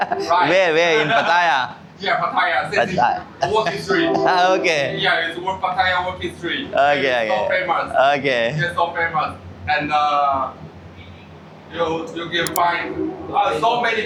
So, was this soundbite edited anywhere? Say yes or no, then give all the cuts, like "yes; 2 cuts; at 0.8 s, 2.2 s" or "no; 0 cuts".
no; 0 cuts